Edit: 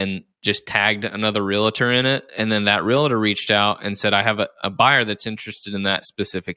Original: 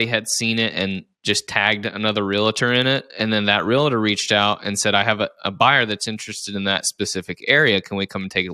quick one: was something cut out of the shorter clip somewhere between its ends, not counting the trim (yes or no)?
no